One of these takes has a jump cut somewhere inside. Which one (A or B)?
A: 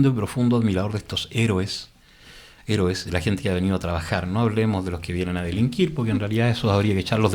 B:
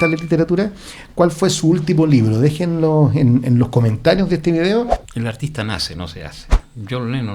B